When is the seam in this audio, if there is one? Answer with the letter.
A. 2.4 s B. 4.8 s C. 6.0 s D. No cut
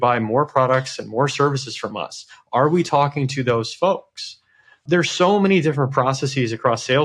B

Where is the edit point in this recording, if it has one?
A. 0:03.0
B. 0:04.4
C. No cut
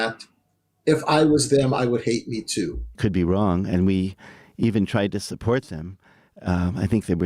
A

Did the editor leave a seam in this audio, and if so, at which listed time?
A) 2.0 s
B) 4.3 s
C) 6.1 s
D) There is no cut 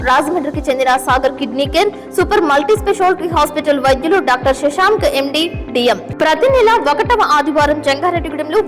C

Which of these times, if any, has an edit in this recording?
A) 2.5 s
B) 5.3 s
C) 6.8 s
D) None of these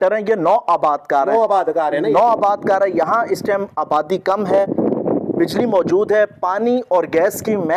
D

